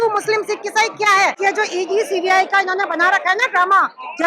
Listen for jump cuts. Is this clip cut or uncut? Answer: cut